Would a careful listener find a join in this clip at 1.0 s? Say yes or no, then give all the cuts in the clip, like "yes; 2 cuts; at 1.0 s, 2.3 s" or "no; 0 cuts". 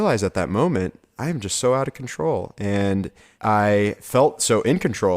no; 2 cuts; at 3.2 s, 4.0 s